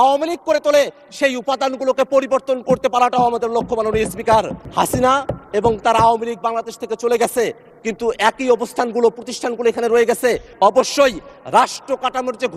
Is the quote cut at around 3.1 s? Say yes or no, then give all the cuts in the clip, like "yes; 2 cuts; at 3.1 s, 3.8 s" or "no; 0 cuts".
no; 2 cuts; at 4.6 s, 10.5 s